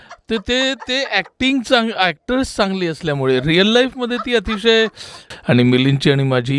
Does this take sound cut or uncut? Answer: cut